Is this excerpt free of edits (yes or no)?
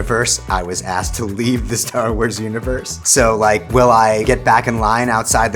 no